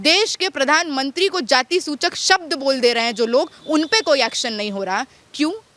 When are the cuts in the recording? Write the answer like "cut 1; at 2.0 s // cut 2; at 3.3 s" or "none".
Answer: none